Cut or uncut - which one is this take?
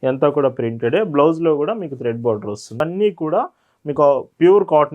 cut